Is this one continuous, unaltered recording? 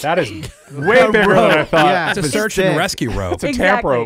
no; 1 cut; at 2.2 s

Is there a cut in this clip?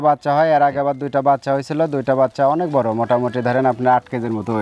no; 0 cuts

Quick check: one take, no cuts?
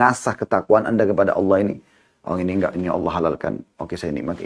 yes; 0 cuts

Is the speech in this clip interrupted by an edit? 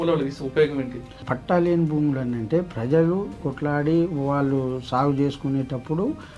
yes; 2 cuts; at 1.3 s, 3.5 s

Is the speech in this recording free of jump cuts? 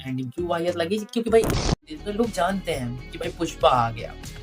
no; 1 cut; at 1.6 s

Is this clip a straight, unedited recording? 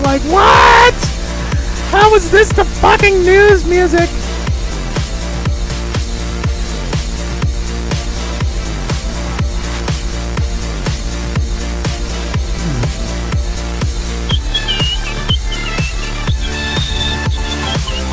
yes; 0 cuts

